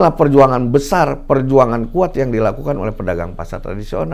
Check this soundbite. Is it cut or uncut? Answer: uncut